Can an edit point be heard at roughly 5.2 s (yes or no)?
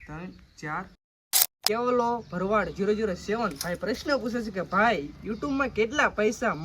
no